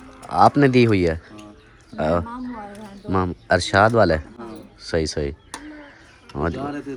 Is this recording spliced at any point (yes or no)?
no